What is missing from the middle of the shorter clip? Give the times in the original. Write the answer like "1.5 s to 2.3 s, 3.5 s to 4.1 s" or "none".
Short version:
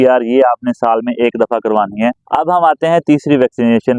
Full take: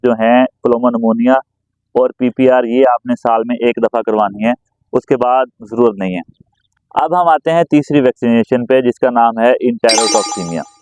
4.6 s to 6.8 s